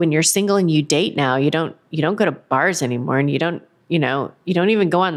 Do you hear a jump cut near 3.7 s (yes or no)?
no